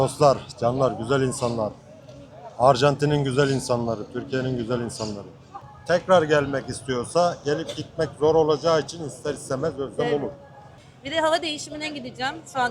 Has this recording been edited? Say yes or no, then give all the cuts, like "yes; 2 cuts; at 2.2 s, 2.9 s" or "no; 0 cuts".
yes; 2 cuts; at 5.5 s, 10.7 s